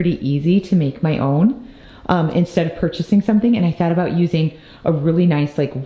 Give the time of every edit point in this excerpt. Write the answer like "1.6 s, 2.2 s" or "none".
none